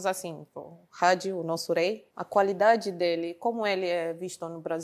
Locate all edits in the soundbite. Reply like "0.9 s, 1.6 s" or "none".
2.1 s

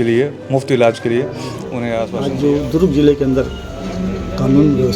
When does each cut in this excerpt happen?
2.1 s

